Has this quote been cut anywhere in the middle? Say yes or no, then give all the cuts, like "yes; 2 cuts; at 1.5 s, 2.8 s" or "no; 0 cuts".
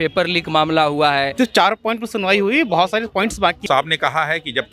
yes; 2 cuts; at 1.3 s, 3.6 s